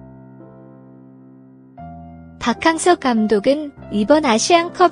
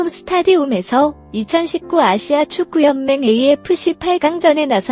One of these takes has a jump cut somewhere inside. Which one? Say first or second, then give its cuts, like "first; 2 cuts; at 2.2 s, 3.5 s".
first; 1 cut; at 2.4 s